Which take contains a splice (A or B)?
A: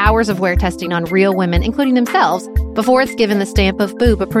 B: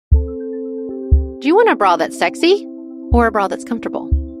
B